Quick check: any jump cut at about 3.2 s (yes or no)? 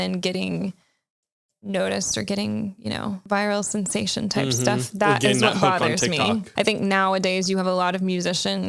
yes